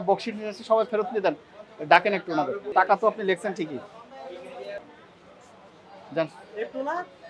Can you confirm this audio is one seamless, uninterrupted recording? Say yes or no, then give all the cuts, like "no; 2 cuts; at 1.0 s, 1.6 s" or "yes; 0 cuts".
no; 2 cuts; at 2.6 s, 4.9 s